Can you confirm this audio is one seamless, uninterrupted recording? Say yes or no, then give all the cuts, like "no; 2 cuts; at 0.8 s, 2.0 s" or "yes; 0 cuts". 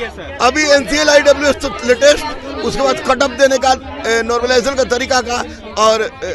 yes; 0 cuts